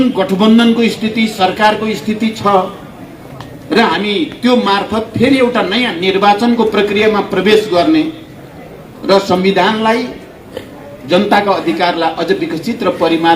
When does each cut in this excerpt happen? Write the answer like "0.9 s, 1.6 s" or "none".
none